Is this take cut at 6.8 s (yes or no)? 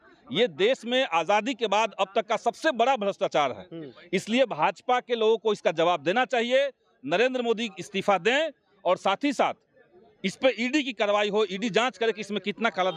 no